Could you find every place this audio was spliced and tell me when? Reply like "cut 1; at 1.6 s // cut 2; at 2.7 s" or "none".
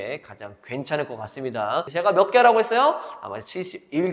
cut 1; at 1.9 s